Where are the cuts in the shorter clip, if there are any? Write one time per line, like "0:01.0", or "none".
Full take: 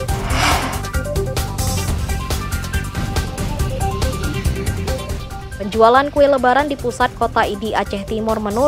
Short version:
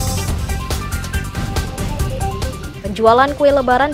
0:02.7